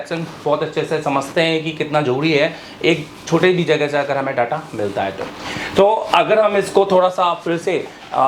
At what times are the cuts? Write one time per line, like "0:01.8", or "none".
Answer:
none